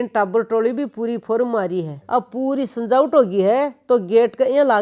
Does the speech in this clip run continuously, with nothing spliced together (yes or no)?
yes